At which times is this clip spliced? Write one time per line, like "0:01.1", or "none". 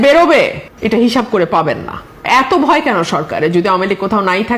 0:02.2